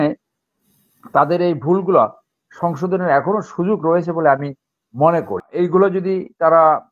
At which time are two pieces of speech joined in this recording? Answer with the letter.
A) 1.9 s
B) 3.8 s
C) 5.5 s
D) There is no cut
C